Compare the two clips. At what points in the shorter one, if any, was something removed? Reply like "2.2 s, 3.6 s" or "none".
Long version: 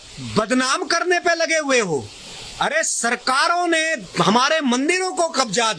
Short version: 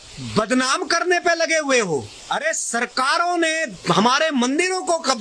2.1 s

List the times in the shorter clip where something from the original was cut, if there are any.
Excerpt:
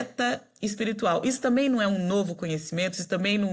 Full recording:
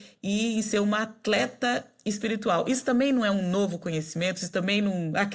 none

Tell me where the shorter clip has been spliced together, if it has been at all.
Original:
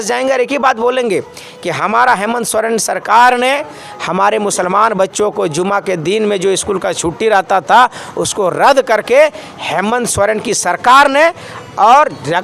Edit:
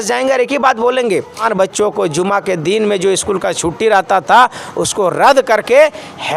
1.4 s

